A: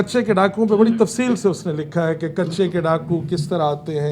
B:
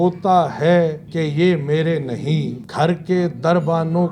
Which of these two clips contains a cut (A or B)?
B